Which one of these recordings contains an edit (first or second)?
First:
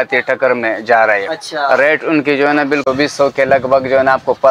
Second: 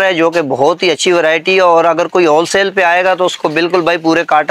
first